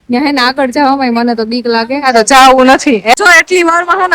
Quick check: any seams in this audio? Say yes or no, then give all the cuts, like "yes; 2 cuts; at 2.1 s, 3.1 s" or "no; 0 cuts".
yes; 1 cut; at 3.1 s